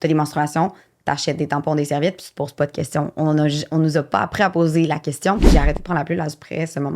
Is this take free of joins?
no; 1 cut; at 5.4 s

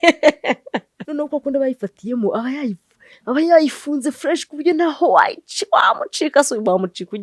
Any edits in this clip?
yes; 1 cut; at 1.0 s

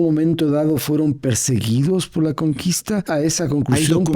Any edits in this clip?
yes; 1 cut; at 3.1 s

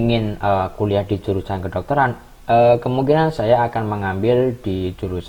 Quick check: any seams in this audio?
no; 0 cuts

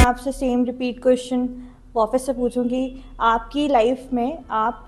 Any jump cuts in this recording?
no; 0 cuts

